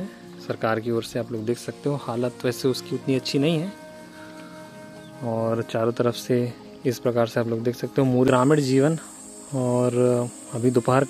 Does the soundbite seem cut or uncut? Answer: cut